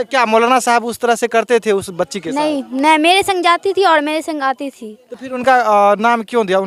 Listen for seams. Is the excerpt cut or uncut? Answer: uncut